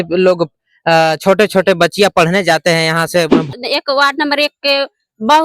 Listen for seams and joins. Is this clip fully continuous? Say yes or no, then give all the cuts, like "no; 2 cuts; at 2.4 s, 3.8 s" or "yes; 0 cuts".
no; 1 cut; at 3.5 s